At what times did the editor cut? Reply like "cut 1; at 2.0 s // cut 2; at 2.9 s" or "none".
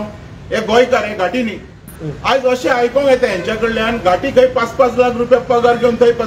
none